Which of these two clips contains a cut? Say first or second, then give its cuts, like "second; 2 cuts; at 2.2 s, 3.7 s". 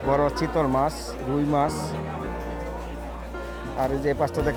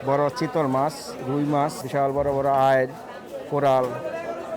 second; 1 cut; at 1.8 s